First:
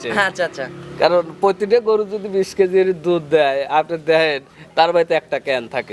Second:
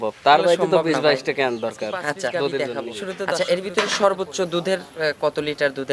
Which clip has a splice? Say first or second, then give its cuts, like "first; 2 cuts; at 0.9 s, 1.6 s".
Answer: second; 1 cut; at 3.3 s